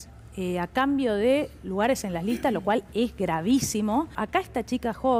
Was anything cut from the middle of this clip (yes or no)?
yes